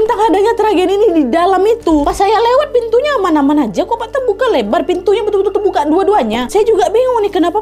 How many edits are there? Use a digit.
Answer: 1